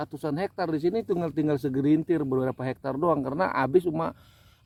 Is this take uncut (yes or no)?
yes